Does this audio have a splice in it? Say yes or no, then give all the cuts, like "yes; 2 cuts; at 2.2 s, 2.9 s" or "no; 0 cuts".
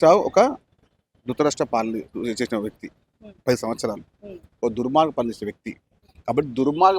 no; 0 cuts